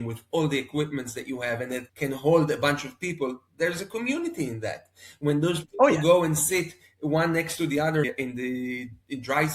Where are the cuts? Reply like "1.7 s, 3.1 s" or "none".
8.1 s